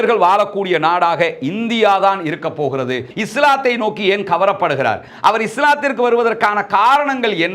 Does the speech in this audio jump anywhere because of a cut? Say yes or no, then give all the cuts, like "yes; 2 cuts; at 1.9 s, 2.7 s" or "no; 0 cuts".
yes; 1 cut; at 3.1 s